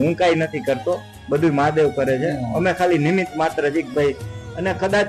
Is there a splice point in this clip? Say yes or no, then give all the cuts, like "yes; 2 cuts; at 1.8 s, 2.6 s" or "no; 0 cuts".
no; 0 cuts